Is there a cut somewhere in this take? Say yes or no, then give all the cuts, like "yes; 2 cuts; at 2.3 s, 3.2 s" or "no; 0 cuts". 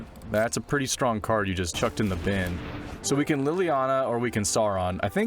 yes; 2 cuts; at 1.7 s, 3.0 s